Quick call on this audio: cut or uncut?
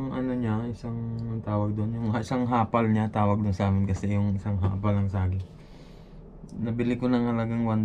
uncut